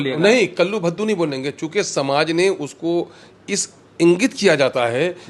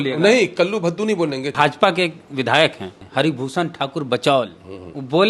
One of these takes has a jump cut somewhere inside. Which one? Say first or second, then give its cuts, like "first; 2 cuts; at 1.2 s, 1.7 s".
second; 1 cut; at 1.5 s